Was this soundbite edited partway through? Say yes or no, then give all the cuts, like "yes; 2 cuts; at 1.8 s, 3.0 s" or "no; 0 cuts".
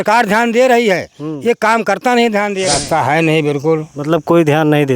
yes; 1 cut; at 2.8 s